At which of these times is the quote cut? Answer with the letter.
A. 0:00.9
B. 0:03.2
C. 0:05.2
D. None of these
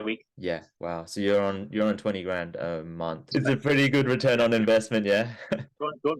B